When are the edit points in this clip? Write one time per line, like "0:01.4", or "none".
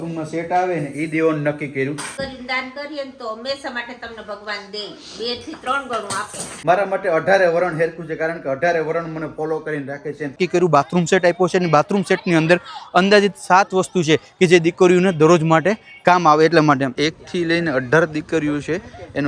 0:02.1
0:06.4
0:10.4
0:16.9